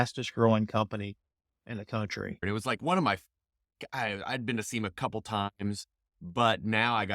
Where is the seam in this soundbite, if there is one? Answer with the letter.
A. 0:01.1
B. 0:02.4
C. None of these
B